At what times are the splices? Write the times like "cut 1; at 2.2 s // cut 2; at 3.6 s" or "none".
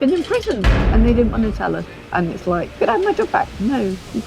cut 1; at 1.9 s // cut 2; at 2.7 s